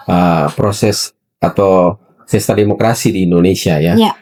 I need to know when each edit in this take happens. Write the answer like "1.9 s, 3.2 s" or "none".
none